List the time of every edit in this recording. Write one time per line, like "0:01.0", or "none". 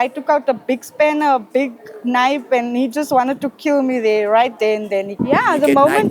0:05.2